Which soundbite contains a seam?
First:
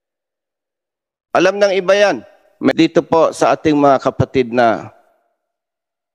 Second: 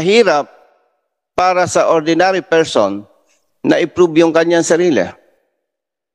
first; 1 cut; at 2.6 s

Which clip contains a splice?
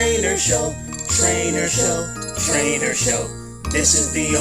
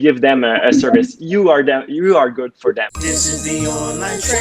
second; 1 cut; at 2.9 s

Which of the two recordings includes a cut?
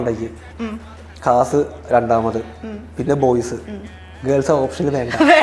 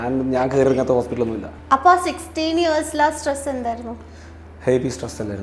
second; 1 cut; at 1.5 s

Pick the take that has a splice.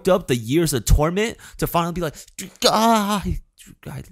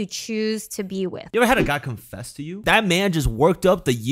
second; 2 cuts; at 1.2 s, 2.5 s

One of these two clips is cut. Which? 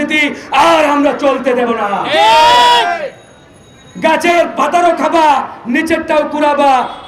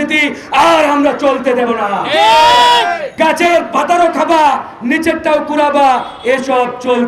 second; 1 cut; at 3.1 s

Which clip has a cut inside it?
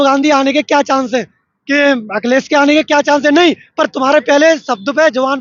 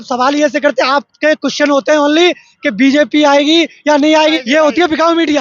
second; 1 cut; at 4.4 s

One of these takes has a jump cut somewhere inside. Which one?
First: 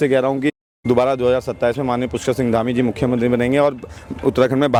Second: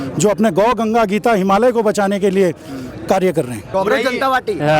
second; 1 cut; at 3.6 s

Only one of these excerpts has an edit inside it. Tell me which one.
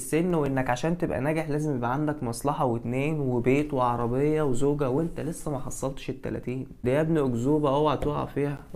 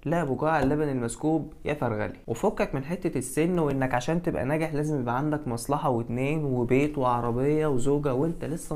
second; 1 cut; at 2.2 s

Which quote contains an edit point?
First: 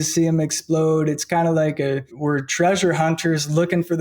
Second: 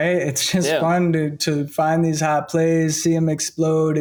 first; 1 cut; at 2.1 s

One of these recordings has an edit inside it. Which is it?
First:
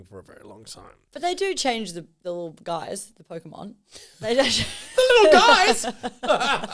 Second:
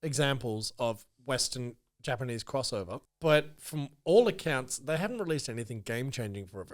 second; 1 cut; at 3.0 s

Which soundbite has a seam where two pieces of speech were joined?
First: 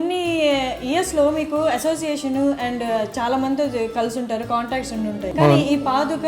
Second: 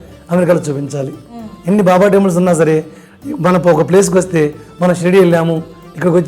first; 1 cut; at 5.3 s

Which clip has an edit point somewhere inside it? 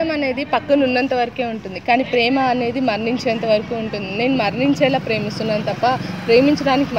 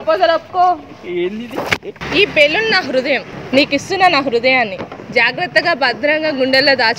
second; 2 cuts; at 1.9 s, 3.3 s

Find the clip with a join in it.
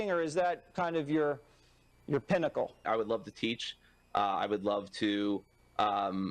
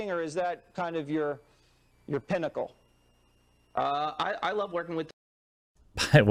first; 1 cut; at 2.8 s

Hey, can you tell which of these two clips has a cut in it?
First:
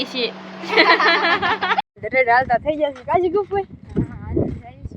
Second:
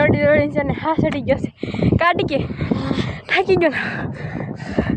first; 1 cut; at 1.8 s

